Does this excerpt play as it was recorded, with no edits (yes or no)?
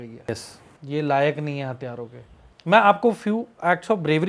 yes